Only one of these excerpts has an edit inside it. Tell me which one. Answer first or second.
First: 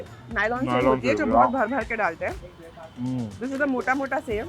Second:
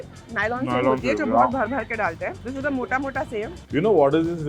second